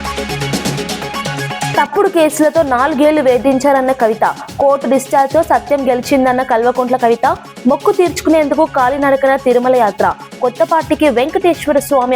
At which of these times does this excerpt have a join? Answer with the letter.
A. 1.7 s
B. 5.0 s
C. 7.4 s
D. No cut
A